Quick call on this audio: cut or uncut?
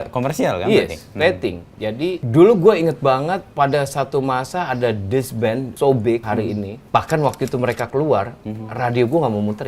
cut